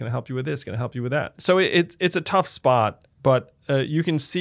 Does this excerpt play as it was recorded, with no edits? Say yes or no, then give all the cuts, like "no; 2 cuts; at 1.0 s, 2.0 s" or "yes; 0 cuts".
no; 1 cut; at 1.3 s